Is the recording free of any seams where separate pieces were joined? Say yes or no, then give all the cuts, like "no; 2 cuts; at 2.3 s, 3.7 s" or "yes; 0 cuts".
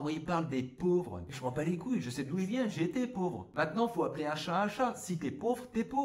yes; 0 cuts